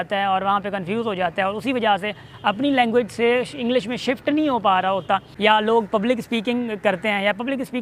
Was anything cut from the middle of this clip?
yes; 1 cut; at 5.3 s

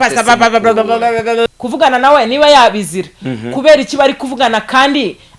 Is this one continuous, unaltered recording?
no; 1 cut; at 1.5 s

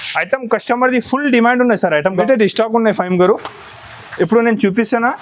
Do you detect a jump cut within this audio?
yes; 1 cut; at 2.2 s

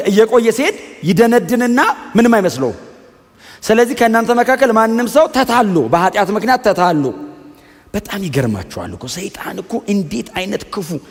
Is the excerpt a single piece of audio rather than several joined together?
yes; 0 cuts

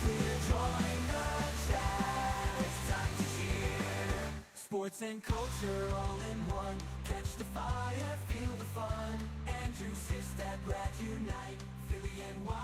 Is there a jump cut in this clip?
no; 0 cuts

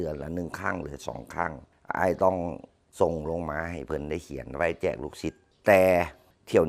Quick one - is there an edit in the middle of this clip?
yes; 1 cut; at 5.5 s

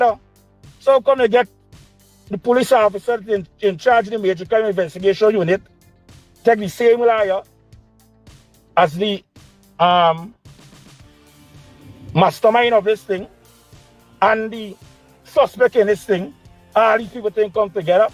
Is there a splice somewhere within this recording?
no; 0 cuts

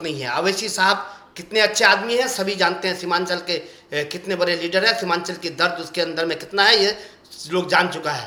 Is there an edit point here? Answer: no; 0 cuts

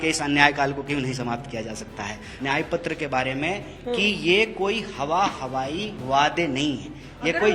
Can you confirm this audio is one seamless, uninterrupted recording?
no; 1 cut; at 2.3 s

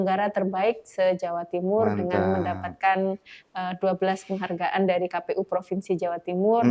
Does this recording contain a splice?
no; 0 cuts

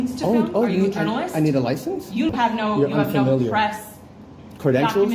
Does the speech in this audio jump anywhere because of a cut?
yes; 1 cut; at 2.3 s

